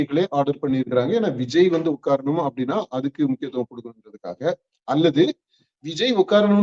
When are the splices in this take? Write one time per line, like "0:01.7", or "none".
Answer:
none